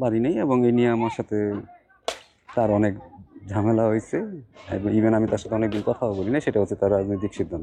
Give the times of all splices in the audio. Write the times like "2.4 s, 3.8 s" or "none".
none